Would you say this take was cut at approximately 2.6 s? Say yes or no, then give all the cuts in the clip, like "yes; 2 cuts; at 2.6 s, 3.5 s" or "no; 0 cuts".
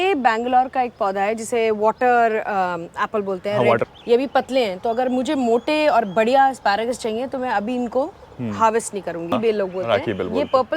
no; 2 cuts; at 3.8 s, 9.3 s